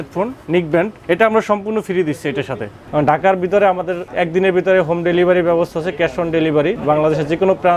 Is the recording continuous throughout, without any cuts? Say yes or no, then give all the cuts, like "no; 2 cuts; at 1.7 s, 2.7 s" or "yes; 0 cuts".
no; 4 cuts; at 1.0 s, 2.7 s, 4.0 s, 6.8 s